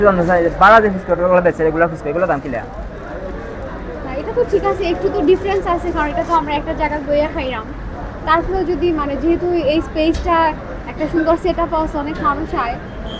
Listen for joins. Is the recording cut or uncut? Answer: uncut